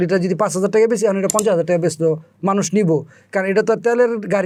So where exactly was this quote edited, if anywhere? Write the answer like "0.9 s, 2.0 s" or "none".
none